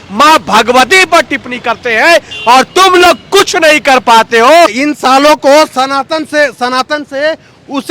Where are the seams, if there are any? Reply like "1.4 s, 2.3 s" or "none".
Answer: 4.8 s